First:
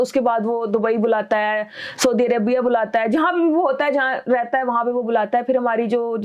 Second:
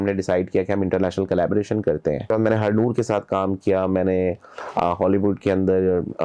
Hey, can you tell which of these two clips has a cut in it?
second; 1 cut; at 2.3 s

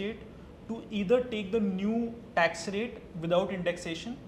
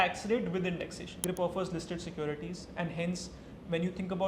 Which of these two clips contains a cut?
second; 1 cut; at 1.1 s

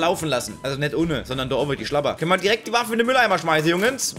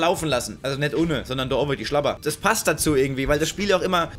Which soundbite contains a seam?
first; 1 cut; at 2.2 s

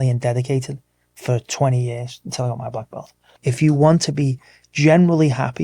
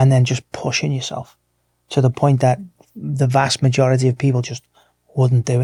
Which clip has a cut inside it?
first; 1 cut; at 3.2 s

